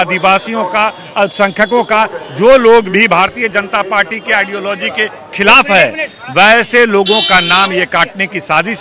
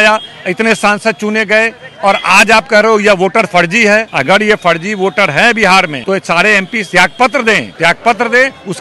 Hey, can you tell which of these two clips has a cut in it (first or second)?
second